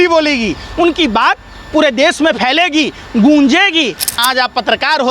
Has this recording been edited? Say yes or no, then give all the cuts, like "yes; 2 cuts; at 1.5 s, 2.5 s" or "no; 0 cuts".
yes; 1 cut; at 4.2 s